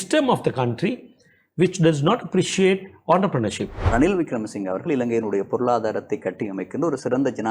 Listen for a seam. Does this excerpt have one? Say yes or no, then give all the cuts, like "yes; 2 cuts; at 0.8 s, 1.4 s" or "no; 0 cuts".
yes; 1 cut; at 3.8 s